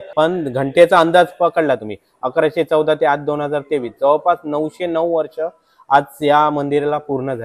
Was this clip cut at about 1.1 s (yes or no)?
no